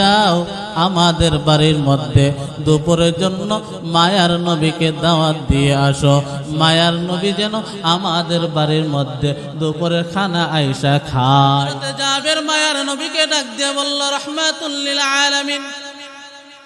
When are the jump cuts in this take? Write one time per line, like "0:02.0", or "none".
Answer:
0:11.9